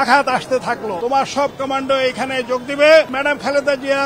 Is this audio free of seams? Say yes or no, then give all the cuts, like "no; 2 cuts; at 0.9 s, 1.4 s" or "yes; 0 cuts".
no; 2 cuts; at 0.9 s, 3.2 s